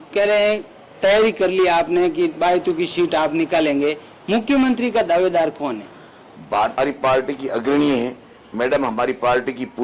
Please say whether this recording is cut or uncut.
cut